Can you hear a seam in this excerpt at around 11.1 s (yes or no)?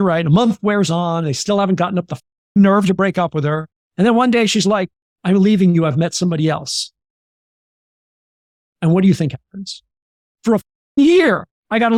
no